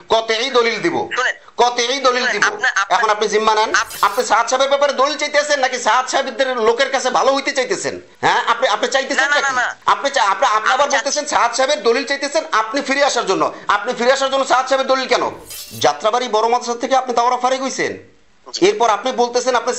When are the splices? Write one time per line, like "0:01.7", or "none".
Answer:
0:03.9
0:15.5